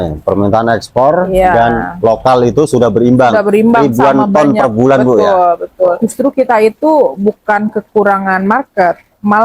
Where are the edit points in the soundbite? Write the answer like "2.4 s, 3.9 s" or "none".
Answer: 6.0 s

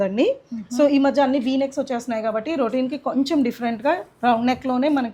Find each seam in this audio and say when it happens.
none

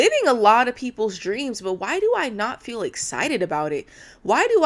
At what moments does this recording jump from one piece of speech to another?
none

